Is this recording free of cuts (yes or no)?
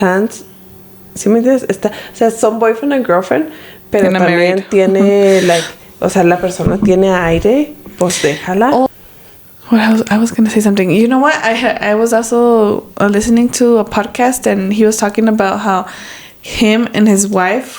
no